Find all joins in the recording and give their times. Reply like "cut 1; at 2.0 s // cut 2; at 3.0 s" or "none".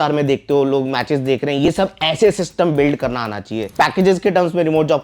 cut 1; at 3.7 s